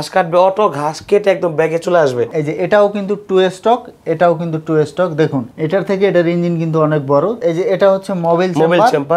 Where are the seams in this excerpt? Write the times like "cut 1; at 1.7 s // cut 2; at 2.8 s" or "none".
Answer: cut 1; at 2.3 s // cut 2; at 7.4 s